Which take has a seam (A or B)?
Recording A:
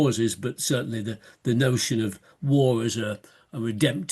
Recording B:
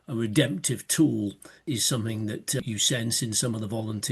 B